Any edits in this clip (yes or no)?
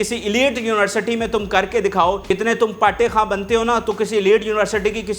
yes